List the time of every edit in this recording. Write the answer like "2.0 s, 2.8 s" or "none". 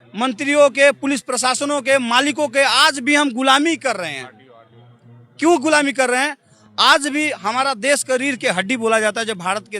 none